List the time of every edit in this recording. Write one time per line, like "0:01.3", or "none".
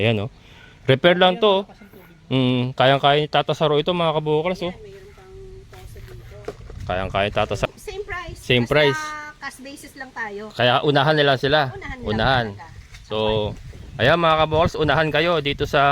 0:07.7